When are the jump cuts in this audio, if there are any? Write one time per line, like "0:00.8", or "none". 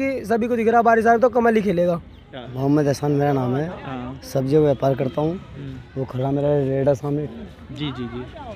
0:02.1

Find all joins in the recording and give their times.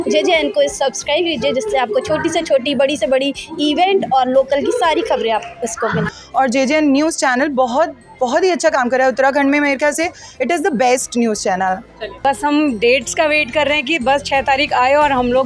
0:06.2
0:12.2

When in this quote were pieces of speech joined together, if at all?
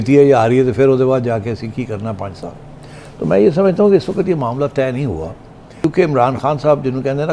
0:05.8

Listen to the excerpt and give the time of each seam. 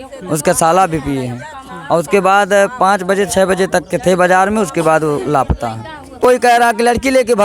0:06.1

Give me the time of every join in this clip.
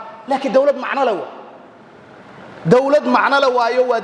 none

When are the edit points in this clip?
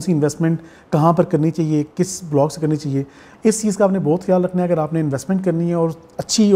0:03.2

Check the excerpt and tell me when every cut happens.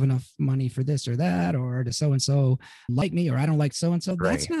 0:02.9

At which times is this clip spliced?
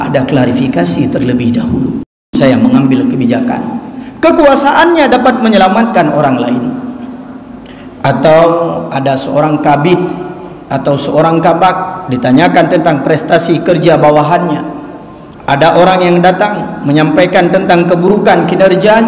0:02.3

